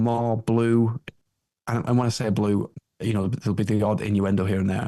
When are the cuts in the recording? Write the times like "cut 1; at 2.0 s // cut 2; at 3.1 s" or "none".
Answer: cut 1; at 2.8 s